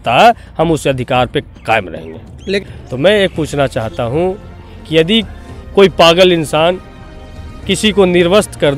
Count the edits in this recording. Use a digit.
1